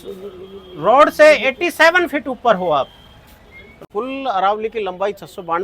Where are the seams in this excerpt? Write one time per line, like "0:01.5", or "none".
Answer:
0:03.8